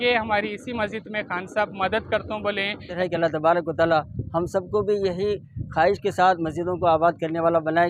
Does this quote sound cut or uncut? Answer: cut